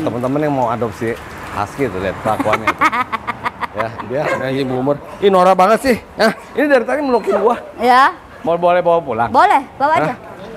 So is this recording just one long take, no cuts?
no; 1 cut; at 4.4 s

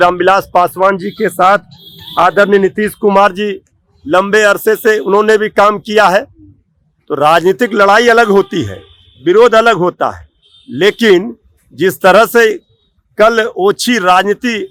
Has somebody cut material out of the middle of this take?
no; 0 cuts

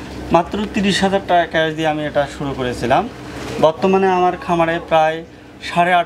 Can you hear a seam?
no; 0 cuts

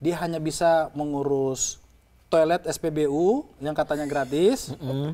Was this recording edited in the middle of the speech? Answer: no; 0 cuts

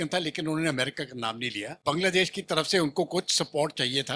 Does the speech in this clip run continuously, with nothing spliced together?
no; 1 cut; at 1.8 s

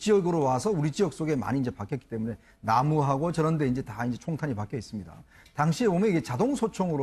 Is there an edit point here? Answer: no; 0 cuts

